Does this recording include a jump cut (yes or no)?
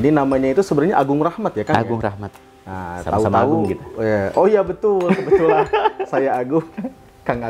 no